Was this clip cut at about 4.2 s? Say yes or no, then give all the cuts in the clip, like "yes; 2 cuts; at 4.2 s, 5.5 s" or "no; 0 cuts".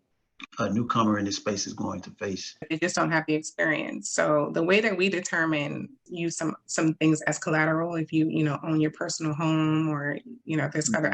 no; 2 cuts; at 2.7 s, 6.1 s